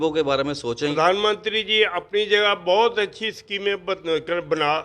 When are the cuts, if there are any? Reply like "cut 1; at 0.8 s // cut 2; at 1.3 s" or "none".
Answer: cut 1; at 0.9 s